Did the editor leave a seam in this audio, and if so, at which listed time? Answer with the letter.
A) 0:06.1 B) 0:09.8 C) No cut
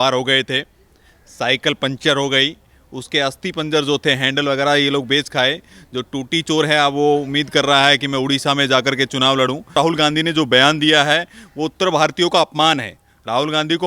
B